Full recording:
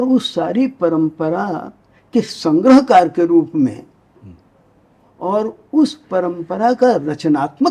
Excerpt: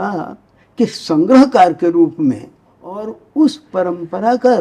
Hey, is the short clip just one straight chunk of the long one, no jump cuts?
no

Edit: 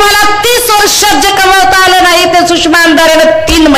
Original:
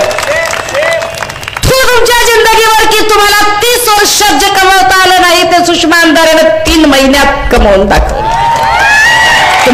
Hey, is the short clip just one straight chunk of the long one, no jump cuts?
yes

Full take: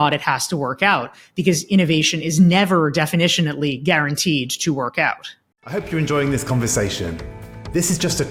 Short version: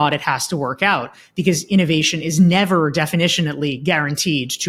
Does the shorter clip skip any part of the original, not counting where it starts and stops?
no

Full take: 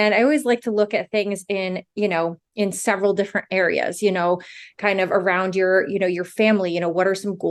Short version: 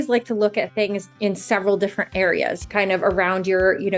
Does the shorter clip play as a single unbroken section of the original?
no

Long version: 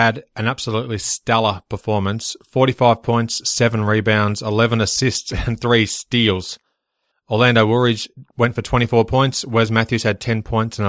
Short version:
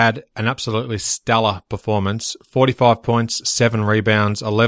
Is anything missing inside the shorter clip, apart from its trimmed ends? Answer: no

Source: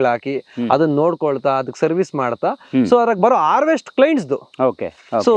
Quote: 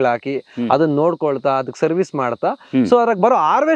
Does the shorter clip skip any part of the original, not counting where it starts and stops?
no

